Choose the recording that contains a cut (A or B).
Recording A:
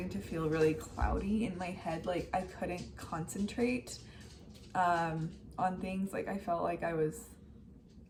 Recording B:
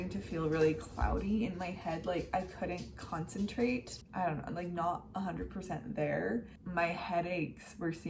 B